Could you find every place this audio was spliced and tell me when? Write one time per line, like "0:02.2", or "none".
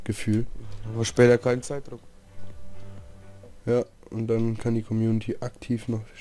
none

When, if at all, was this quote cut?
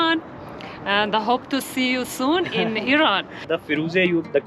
0:03.6

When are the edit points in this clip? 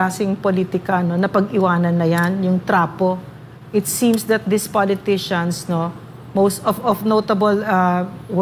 none

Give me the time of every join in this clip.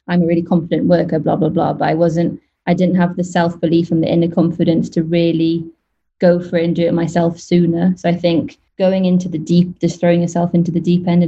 0:08.6

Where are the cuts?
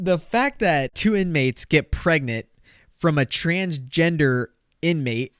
0:00.9

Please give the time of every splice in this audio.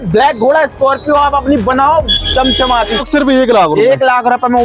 0:03.0

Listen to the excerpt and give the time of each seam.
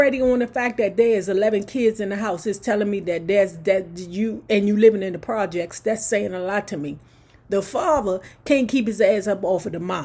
none

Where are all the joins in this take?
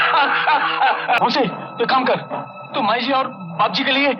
0:01.2

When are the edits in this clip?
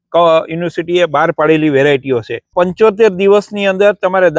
0:02.5

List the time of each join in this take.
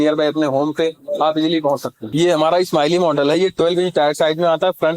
0:02.0

